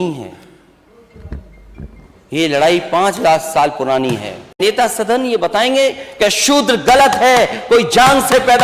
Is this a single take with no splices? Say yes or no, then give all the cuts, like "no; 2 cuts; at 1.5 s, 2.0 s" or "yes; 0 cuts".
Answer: no; 1 cut; at 4.6 s